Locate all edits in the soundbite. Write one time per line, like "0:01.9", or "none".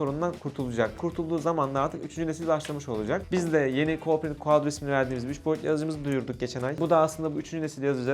0:01.0
0:03.3

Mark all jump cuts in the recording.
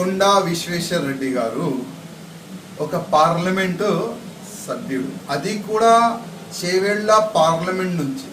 0:01.4

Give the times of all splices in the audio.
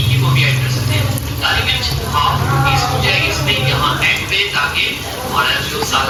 none

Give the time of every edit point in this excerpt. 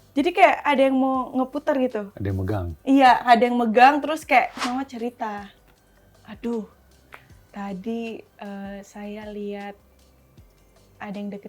0:04.7

